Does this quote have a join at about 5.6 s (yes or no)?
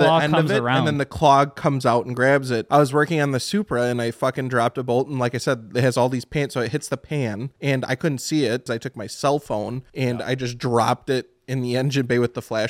no